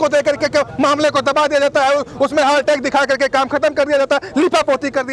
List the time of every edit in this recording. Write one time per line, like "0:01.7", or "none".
none